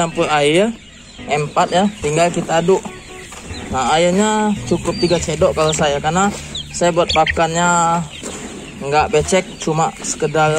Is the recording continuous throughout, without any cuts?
yes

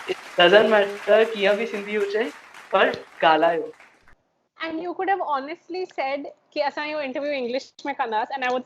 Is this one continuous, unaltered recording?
no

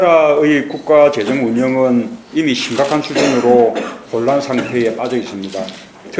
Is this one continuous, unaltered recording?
yes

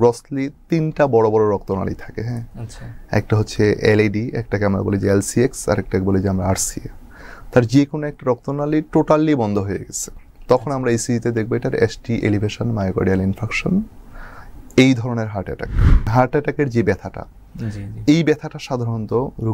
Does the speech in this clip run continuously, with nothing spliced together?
no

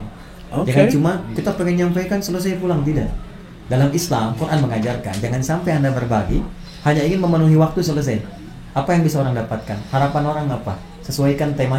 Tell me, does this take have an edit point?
no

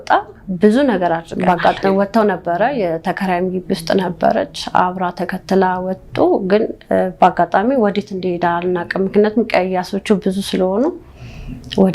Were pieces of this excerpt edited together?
yes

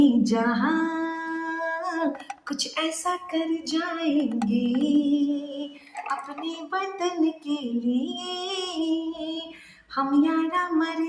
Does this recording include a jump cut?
no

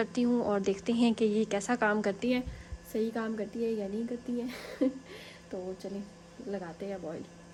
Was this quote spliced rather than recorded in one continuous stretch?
no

